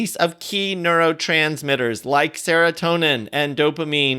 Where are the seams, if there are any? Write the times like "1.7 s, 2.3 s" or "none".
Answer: none